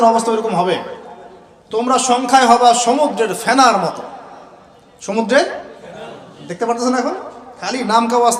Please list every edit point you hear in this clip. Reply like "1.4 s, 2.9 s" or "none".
none